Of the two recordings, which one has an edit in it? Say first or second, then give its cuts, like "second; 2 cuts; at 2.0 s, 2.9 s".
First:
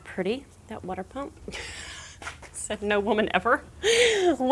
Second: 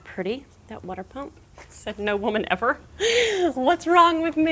second; 1 cut; at 1.4 s